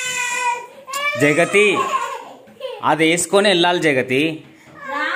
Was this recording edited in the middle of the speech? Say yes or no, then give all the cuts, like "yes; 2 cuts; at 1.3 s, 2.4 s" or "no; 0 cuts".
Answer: no; 0 cuts